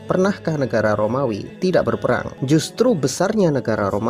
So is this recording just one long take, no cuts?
no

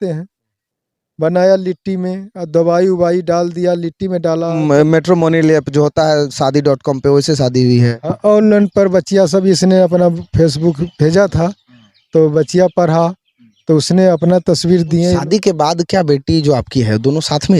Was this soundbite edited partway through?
yes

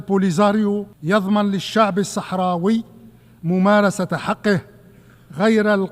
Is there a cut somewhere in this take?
yes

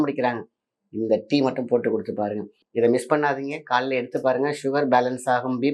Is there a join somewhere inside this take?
yes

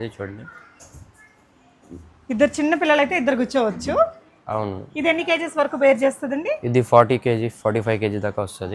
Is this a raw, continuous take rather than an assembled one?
yes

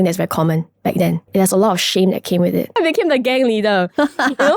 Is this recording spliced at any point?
yes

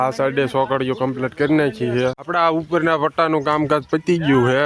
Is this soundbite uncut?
no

